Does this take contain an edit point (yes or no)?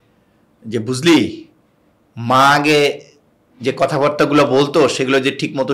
no